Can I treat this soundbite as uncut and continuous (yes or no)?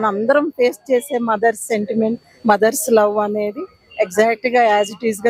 yes